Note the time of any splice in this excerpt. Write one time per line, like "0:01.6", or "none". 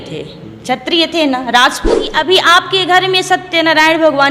0:02.1